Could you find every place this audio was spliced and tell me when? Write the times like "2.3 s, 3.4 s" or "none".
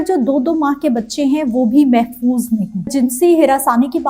2.9 s

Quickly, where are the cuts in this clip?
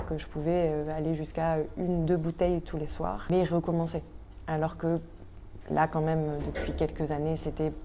3.3 s

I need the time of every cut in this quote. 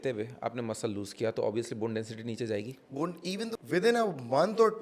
3.6 s

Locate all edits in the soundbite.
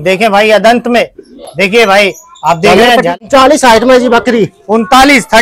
3.2 s

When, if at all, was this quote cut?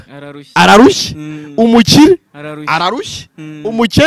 none

